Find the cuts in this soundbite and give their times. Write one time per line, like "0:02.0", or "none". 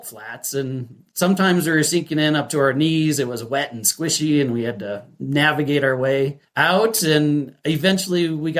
none